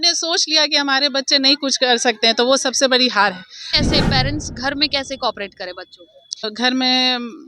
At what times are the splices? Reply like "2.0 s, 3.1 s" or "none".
3.7 s, 6.4 s